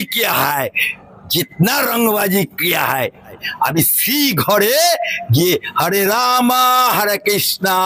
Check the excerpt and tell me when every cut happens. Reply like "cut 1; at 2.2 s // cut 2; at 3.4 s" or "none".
cut 1; at 3.4 s